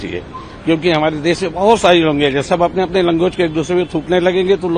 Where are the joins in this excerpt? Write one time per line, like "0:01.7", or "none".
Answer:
none